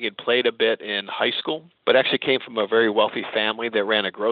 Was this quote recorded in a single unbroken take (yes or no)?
no